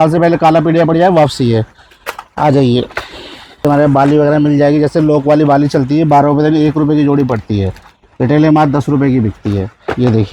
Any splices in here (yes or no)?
no